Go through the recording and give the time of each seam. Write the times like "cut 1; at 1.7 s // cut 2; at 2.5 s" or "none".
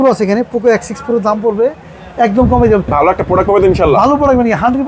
cut 1; at 2.9 s